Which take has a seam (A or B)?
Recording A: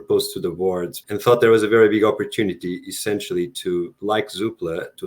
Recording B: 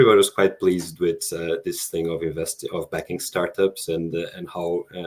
A